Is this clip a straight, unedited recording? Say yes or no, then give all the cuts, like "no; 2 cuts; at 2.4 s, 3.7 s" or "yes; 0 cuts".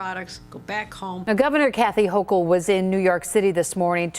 no; 1 cut; at 1.3 s